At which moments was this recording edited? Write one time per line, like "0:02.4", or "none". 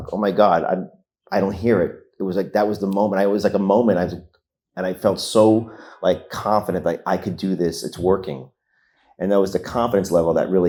none